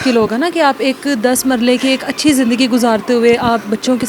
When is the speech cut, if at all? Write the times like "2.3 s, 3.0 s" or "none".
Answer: none